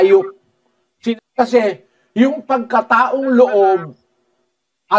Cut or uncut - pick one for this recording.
cut